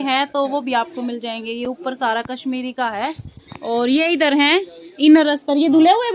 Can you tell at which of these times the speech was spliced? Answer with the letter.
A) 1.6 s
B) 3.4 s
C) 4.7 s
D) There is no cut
D